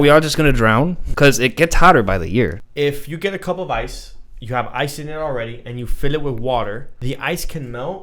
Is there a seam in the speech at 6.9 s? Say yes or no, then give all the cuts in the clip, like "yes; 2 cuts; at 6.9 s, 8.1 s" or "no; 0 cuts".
yes; 3 cuts; at 1.0 s, 2.6 s, 6.9 s